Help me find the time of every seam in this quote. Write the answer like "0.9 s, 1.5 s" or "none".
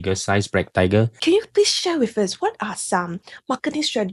1.2 s